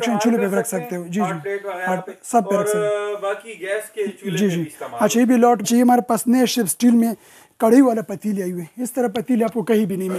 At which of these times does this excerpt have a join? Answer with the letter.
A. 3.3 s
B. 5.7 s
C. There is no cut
B